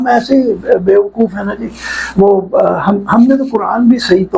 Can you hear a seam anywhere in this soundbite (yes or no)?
no